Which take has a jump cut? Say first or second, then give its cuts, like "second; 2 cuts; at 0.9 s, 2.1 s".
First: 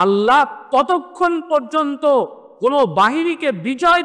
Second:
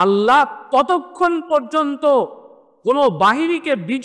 first; 1 cut; at 2.4 s